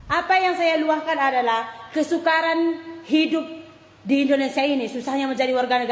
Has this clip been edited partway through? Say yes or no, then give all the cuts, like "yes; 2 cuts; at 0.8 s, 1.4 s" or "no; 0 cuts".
no; 0 cuts